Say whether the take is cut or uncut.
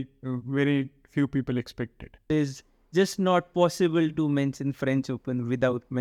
cut